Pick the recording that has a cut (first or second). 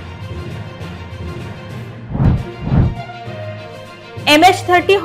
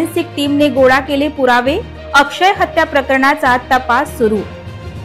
first